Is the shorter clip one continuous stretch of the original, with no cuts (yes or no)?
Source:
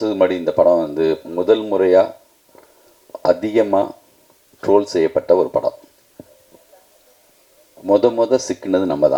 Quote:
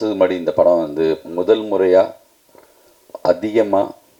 yes